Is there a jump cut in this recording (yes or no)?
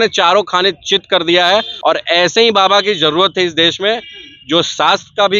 yes